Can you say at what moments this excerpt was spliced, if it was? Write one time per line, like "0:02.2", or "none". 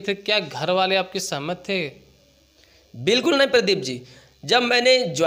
none